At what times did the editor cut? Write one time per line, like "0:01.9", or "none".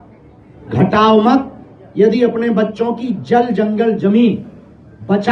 none